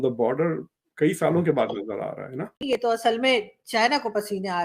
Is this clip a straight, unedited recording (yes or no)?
no